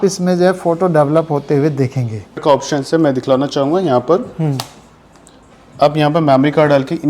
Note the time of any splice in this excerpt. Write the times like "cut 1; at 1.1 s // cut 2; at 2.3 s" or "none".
cut 1; at 2.4 s